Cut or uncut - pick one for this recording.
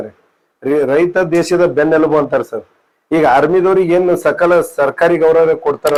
uncut